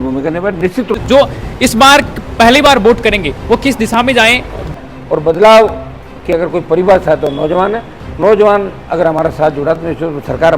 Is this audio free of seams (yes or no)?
no